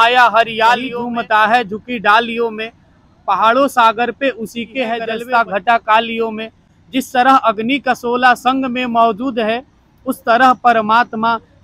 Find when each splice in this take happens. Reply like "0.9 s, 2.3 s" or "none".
1.0 s, 5.1 s